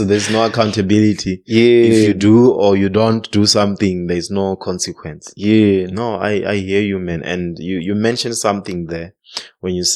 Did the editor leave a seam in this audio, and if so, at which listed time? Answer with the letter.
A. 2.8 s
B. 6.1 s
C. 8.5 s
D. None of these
D